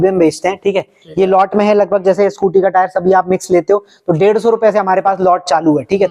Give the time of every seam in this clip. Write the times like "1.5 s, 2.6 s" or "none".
none